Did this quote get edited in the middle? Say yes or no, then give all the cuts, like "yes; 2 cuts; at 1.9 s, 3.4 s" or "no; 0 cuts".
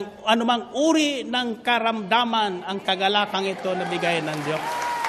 no; 0 cuts